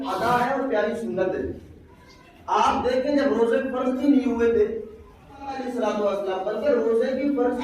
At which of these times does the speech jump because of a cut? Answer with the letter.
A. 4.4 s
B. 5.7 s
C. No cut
B